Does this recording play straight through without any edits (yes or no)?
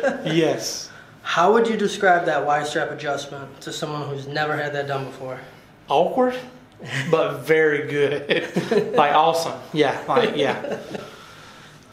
yes